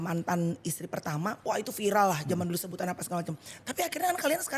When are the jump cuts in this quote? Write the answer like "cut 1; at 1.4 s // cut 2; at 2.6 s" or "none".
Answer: cut 1; at 1.4 s